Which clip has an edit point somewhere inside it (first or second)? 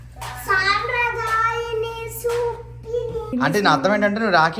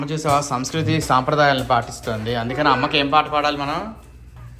first